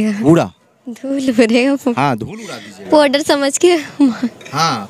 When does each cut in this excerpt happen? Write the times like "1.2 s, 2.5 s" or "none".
none